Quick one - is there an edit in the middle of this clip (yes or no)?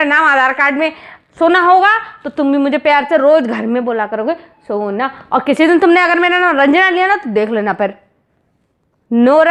no